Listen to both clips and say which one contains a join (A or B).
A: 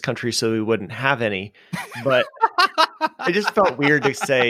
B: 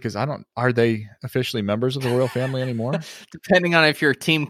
B